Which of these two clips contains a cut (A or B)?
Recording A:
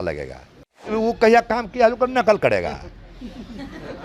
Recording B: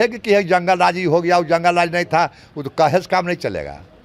A